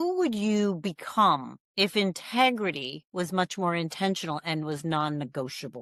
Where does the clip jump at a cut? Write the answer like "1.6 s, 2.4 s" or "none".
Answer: none